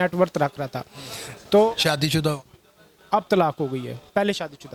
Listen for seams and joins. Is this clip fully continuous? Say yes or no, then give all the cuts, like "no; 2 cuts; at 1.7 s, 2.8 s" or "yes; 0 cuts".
yes; 0 cuts